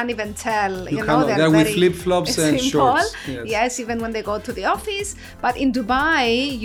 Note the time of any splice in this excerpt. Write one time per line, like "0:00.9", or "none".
none